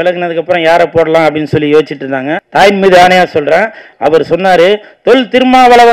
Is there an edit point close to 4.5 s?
no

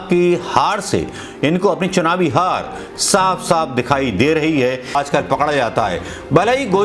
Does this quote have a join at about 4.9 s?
yes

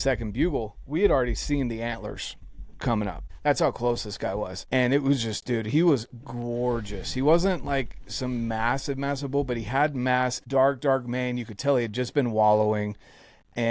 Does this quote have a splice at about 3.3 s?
yes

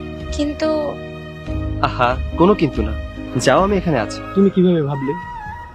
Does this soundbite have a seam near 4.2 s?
yes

